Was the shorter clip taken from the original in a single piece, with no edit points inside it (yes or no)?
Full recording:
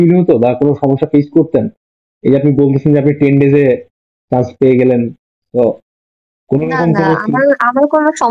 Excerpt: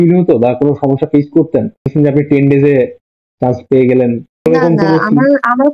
no